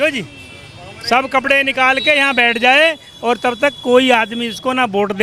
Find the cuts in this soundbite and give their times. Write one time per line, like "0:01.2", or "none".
none